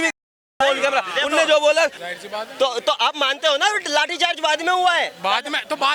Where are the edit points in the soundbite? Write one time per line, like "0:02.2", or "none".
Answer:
0:02.1